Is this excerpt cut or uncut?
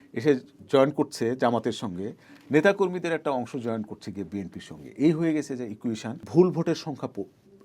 cut